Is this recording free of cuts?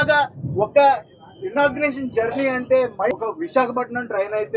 no; 1 cut; at 3.1 s

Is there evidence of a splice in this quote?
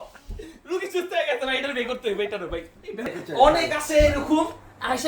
yes; 1 cut; at 3.2 s

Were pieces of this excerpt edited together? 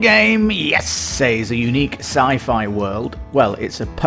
yes; 1 cut; at 1.0 s

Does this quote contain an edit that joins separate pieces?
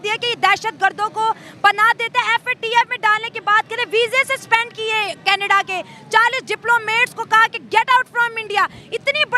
no; 0 cuts

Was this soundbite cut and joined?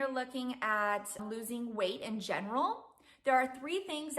yes; 1 cut; at 1.2 s

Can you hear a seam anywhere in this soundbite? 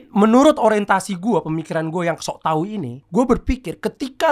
yes; 1 cut; at 3.0 s

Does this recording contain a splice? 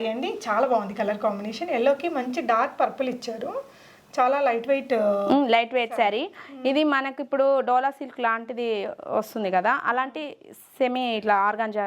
no; 0 cuts

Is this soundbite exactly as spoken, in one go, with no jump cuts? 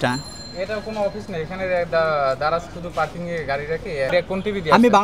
no; 1 cut; at 4.1 s

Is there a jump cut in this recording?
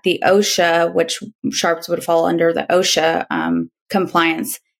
no; 0 cuts

